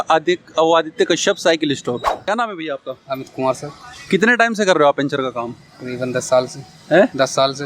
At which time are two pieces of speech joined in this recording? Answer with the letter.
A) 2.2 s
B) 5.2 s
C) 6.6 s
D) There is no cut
A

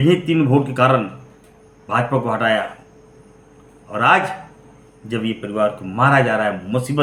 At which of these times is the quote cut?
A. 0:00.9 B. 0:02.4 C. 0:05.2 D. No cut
D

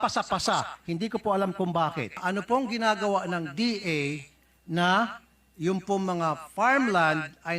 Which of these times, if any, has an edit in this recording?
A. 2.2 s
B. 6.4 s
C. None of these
A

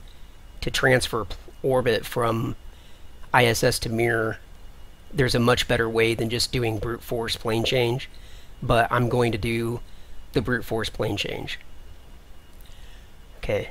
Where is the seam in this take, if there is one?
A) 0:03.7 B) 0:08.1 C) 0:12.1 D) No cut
B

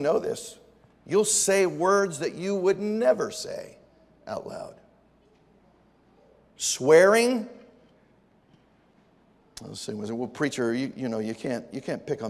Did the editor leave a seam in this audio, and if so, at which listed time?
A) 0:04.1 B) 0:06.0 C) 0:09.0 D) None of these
C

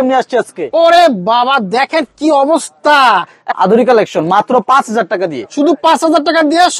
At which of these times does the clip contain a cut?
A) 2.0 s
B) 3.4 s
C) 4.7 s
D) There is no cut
B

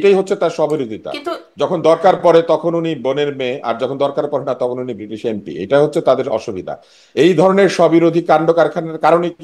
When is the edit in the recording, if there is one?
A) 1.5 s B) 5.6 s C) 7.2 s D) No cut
D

